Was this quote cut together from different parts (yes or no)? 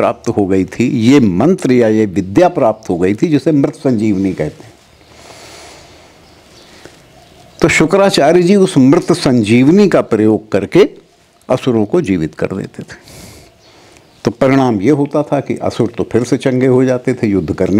no